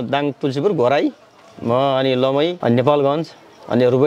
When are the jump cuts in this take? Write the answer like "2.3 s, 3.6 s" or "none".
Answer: 2.6 s